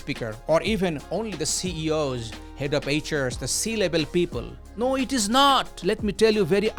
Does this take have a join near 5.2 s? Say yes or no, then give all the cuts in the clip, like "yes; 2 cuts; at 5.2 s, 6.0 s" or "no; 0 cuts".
no; 0 cuts